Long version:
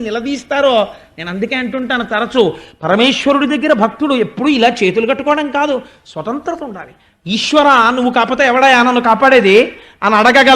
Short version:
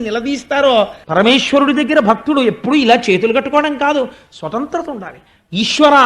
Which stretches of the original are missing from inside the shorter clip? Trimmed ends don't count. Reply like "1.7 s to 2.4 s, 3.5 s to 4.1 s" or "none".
1.0 s to 2.7 s